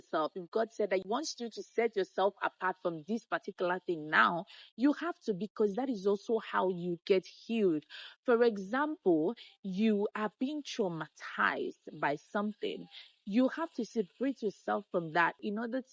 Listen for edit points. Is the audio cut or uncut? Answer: uncut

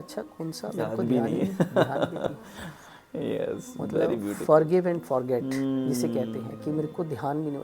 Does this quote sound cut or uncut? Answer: uncut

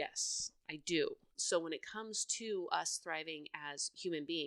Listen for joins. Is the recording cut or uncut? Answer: cut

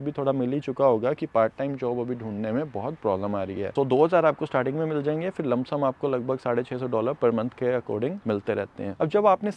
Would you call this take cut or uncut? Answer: uncut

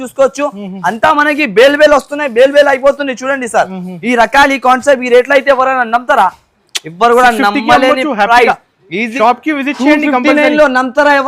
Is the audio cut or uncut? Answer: cut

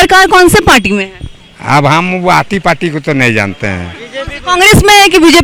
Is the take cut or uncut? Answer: uncut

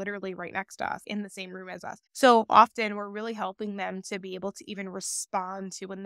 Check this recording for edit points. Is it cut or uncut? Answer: uncut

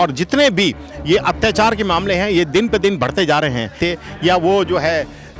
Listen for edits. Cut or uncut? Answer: cut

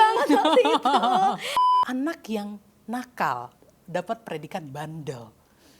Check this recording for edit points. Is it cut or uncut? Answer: cut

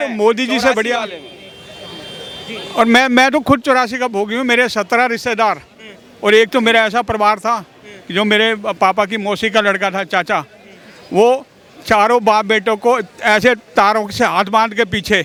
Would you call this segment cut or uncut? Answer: uncut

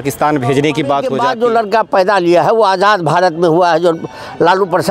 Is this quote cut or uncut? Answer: cut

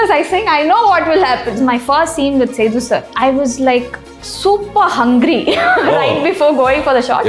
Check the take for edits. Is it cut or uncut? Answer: cut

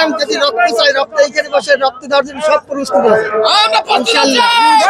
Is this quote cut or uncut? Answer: uncut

